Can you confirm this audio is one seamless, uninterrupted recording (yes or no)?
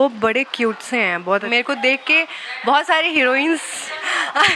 no